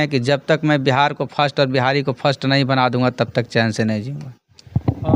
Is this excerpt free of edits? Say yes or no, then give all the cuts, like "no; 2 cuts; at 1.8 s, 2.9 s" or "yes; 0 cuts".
yes; 0 cuts